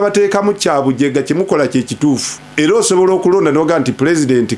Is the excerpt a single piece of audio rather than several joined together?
no; 1 cut; at 2.4 s

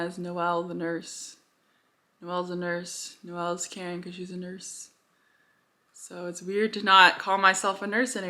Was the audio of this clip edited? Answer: no; 0 cuts

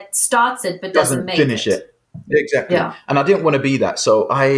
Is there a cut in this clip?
yes; 1 cut; at 0.9 s

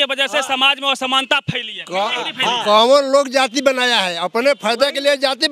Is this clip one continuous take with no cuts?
yes; 0 cuts

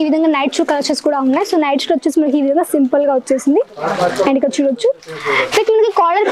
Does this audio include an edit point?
no; 0 cuts

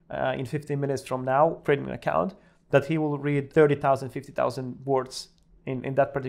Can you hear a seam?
yes; 2 cuts; at 1.6 s, 3.5 s

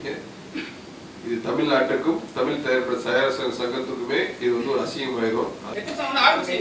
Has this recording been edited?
yes; 1 cut; at 5.6 s

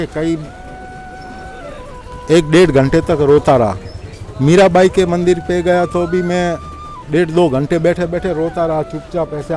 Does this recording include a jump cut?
no; 0 cuts

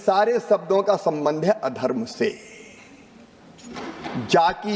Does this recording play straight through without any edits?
yes; 0 cuts

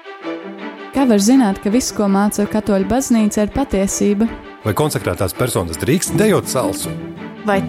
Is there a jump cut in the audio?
yes; 1 cut; at 0.9 s

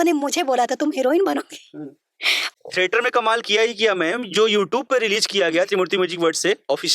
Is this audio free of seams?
yes; 0 cuts

